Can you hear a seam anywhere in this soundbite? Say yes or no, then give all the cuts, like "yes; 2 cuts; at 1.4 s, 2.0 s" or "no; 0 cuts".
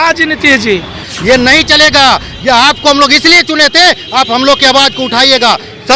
yes; 1 cut; at 1.1 s